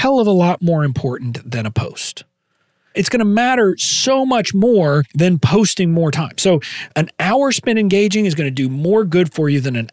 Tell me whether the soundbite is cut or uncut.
cut